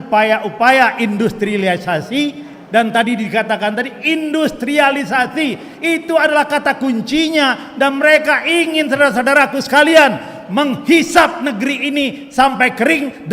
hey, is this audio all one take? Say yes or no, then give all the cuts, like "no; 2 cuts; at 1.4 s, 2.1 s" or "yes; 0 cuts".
yes; 0 cuts